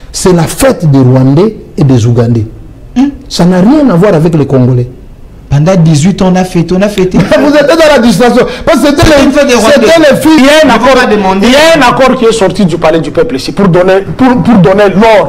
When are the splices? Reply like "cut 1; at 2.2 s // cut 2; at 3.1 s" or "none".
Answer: cut 1; at 10.4 s

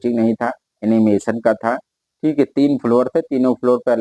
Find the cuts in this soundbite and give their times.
none

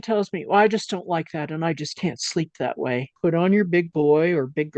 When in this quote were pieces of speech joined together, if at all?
cut 1; at 3.1 s

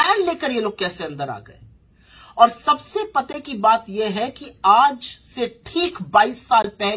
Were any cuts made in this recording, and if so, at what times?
none

